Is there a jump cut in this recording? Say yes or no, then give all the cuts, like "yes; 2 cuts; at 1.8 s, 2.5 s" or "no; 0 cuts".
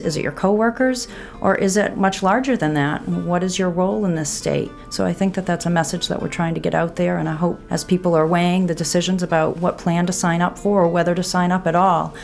yes; 4 cuts; at 2.0 s, 4.8 s, 7.7 s, 9.5 s